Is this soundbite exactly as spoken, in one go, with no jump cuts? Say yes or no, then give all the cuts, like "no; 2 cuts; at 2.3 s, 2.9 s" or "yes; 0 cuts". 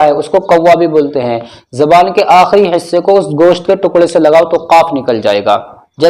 yes; 0 cuts